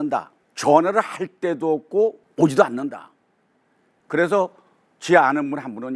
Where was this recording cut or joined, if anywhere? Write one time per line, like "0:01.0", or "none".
none